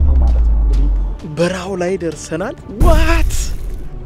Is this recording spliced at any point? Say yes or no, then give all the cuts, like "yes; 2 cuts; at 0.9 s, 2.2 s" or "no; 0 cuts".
yes; 1 cut; at 1.3 s